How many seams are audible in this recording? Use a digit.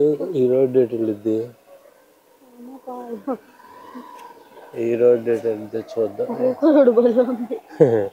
0